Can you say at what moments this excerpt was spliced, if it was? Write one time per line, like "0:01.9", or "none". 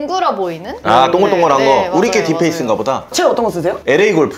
none